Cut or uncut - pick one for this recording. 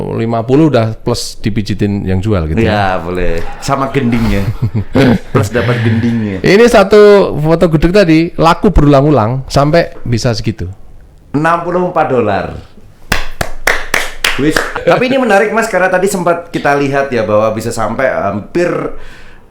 cut